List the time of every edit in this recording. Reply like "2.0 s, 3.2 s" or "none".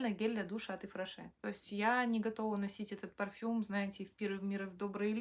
1.3 s